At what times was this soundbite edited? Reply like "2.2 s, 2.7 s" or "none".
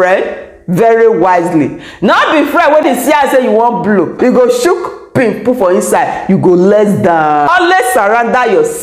2.8 s, 4.1 s, 7.5 s